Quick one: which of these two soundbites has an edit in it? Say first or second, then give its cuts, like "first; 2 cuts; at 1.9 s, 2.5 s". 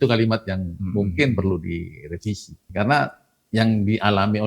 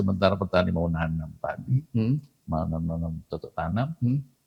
first; 1 cut; at 2.7 s